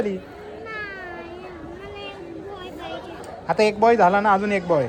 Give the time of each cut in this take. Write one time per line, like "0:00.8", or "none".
none